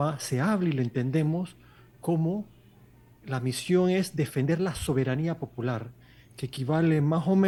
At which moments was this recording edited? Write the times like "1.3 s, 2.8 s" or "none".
none